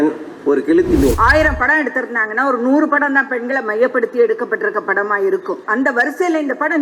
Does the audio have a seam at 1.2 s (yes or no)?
yes